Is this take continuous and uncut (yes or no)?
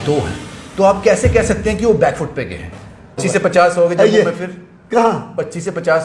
no